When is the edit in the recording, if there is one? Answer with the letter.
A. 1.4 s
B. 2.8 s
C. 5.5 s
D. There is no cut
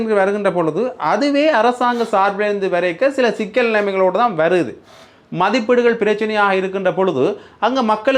D